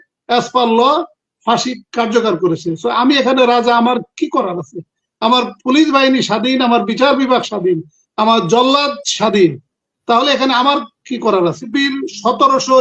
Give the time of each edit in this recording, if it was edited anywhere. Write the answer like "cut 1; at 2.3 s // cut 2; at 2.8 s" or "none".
cut 1; at 11.7 s